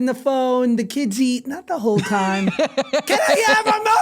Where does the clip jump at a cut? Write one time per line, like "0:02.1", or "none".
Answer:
0:02.8